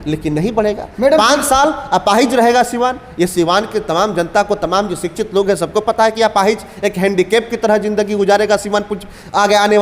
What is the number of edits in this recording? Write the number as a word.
zero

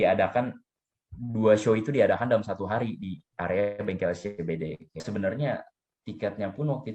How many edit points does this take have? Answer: one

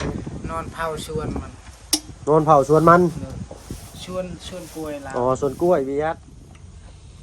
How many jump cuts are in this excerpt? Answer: one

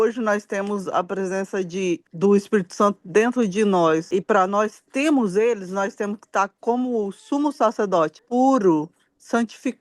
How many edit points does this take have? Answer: three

